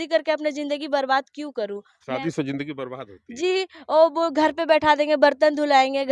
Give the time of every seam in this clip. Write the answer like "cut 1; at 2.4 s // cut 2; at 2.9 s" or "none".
none